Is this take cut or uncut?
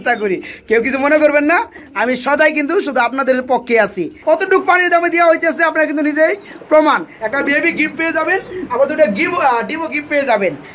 cut